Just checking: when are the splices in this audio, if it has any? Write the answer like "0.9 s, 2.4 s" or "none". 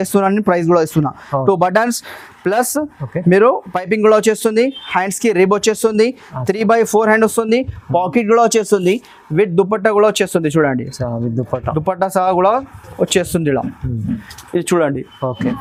none